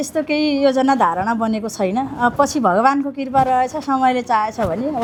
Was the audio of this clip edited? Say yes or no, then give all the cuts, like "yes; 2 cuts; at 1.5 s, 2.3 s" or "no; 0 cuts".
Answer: no; 0 cuts